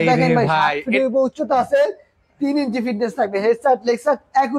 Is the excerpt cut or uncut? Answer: uncut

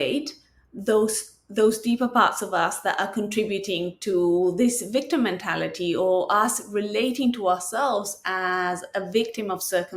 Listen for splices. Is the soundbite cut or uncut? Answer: uncut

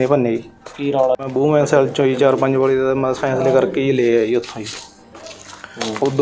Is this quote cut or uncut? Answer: uncut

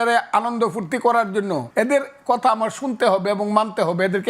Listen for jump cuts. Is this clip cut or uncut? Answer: cut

